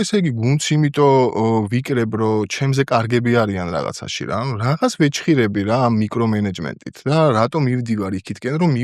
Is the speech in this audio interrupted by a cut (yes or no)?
no